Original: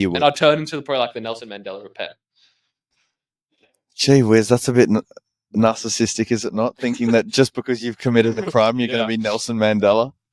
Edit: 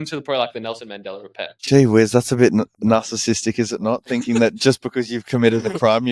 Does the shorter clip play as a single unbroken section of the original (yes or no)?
no